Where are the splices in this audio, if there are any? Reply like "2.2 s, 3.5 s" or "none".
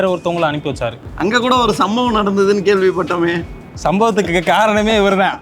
1.0 s

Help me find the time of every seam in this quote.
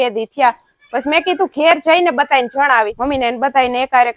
2.9 s

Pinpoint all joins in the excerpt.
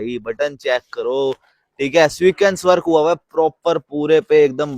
none

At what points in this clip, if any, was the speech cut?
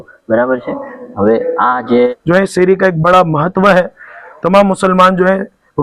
2.1 s

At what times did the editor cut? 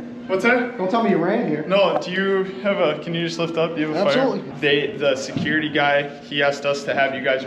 4.4 s

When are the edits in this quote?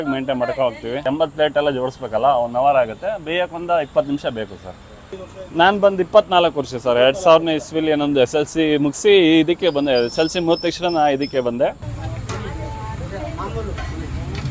1.0 s, 11.9 s

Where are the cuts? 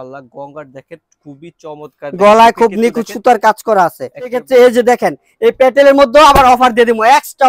4.4 s

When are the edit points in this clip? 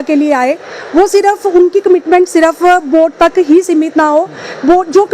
none

